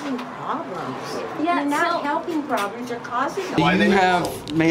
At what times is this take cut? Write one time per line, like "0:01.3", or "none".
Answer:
0:03.6